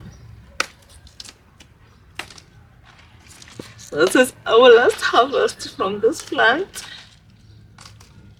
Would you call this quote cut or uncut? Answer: uncut